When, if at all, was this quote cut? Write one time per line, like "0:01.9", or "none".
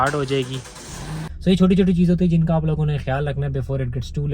0:01.2